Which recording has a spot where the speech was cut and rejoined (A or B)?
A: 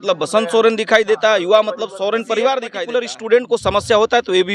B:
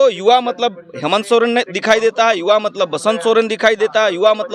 A